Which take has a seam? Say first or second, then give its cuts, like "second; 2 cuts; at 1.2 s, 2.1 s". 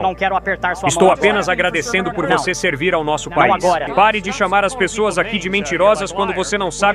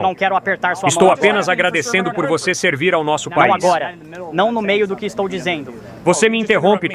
first; 1 cut; at 3.9 s